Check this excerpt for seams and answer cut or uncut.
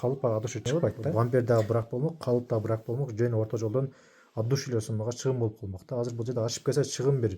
cut